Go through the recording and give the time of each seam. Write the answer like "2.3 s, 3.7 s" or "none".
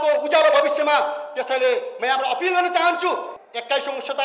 3.3 s